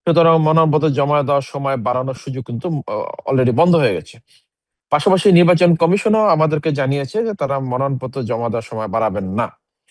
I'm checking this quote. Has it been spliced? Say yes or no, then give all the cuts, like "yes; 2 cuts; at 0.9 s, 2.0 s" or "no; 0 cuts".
no; 0 cuts